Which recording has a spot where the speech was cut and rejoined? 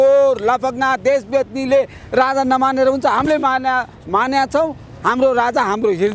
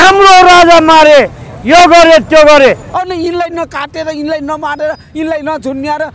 second; 1 cut; at 2.9 s

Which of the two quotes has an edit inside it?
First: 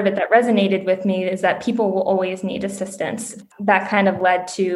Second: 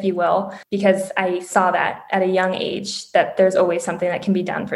first; 1 cut; at 3.3 s

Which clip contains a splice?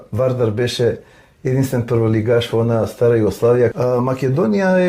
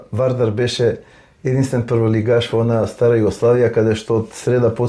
first; 1 cut; at 3.7 s

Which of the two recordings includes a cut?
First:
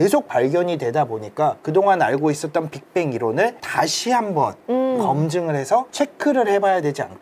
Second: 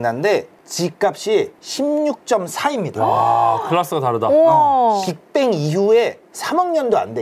second; 1 cut; at 5.0 s

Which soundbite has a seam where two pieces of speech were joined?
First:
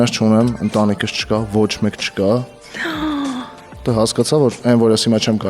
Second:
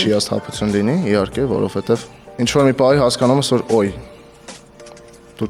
first; 2 cuts; at 2.6 s, 3.7 s

